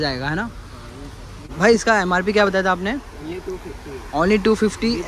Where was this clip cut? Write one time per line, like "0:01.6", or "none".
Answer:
0:01.5